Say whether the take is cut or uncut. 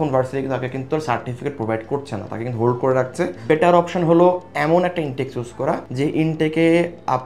cut